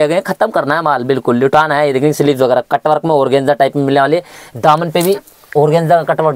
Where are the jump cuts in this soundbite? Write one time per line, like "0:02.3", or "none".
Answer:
none

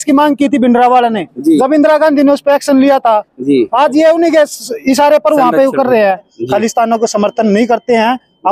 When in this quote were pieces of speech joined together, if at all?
0:06.3

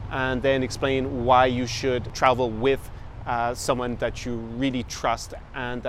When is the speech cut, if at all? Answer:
0:02.1

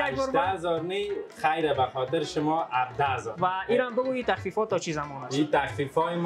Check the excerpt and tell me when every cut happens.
0:03.3

